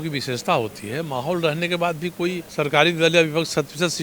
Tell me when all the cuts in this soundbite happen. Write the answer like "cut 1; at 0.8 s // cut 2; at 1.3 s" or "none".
cut 1; at 2.4 s